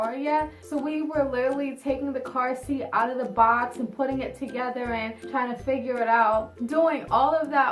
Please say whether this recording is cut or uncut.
uncut